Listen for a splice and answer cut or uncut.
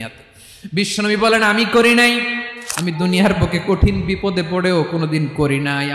cut